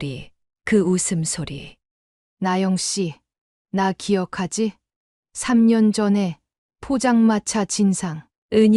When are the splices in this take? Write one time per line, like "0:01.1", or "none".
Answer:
0:02.2